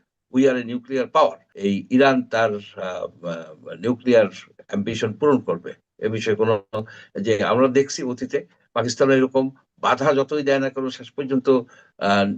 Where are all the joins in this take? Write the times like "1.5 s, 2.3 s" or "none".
1.5 s